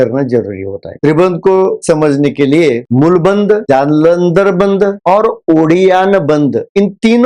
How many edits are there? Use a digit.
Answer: 3